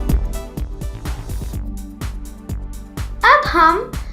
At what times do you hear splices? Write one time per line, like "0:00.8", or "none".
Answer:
0:03.1